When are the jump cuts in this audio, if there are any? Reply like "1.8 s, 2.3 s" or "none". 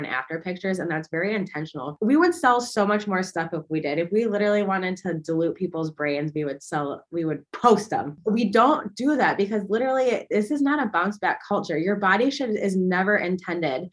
1.9 s, 8.1 s